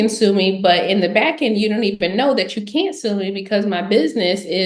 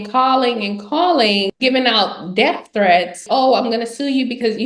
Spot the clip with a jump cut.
second; 2 cuts; at 1.5 s, 3.2 s

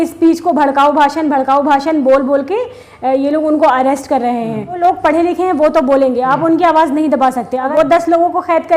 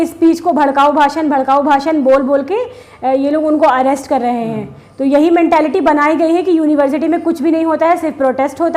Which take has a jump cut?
first; 2 cuts; at 4.8 s, 7.7 s

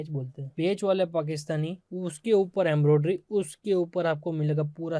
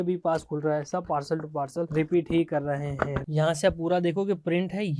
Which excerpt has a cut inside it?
second; 2 cuts; at 1.9 s, 3.2 s

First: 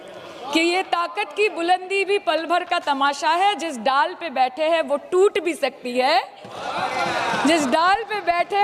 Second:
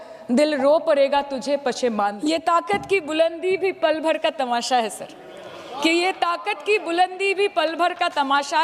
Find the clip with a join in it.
second; 1 cut; at 2.2 s

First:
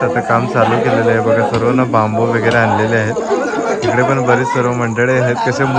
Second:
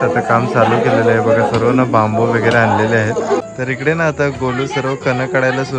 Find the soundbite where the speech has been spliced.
second; 1 cut; at 3.4 s

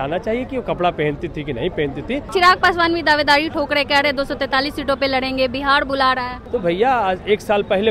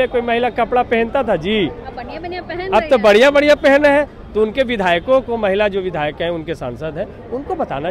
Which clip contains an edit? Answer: first; 2 cuts; at 2.3 s, 6.3 s

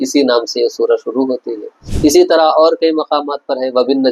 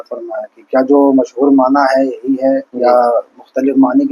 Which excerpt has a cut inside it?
second; 1 cut; at 2.7 s

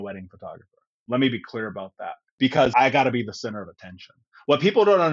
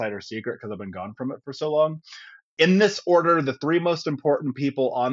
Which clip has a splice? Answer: first; 1 cut; at 2.6 s

